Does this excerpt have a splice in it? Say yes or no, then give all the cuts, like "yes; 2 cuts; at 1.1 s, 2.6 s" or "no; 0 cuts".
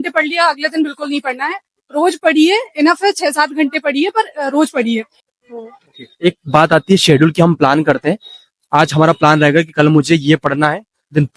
yes; 1 cut; at 5.2 s